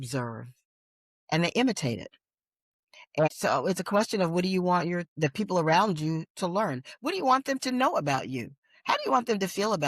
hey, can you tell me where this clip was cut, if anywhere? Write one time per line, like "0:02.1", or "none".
0:02.9